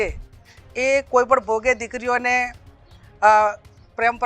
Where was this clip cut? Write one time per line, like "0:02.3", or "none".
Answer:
none